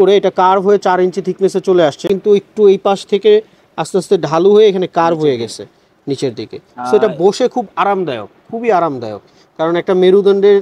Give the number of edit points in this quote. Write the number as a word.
zero